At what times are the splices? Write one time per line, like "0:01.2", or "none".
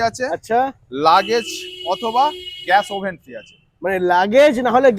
none

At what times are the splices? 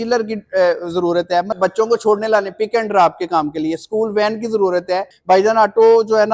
0:01.5
0:05.1

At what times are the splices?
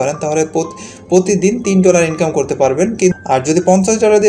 0:03.1

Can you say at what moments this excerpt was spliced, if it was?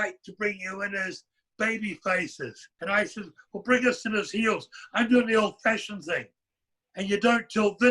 0:02.7

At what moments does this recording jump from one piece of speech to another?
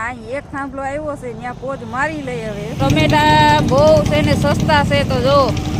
0:02.8

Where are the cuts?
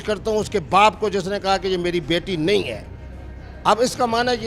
none

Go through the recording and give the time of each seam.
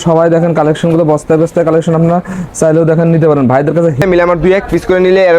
0:04.0

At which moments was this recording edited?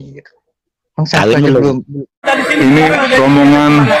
0:02.2

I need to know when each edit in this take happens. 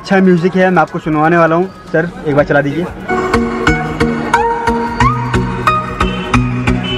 none

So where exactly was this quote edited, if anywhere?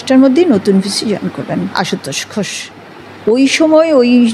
0:02.7

